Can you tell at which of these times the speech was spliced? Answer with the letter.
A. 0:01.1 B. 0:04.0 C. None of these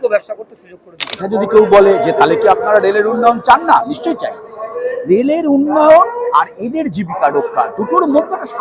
A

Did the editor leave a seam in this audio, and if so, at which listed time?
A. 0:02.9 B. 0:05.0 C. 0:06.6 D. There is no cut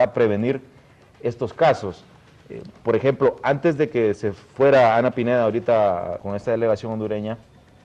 A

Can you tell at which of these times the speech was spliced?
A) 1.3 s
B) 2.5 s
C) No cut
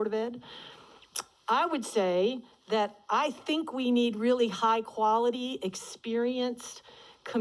B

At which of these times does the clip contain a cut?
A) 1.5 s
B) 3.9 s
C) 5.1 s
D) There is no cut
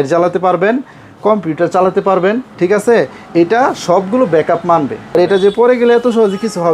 C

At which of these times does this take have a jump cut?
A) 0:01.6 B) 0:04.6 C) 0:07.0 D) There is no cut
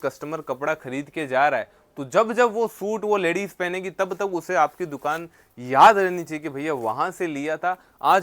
D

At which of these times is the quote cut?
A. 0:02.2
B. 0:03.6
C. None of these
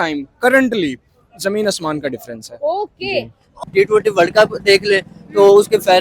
B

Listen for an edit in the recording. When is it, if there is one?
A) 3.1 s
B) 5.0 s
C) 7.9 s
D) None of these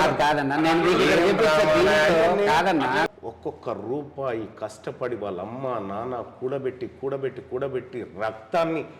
A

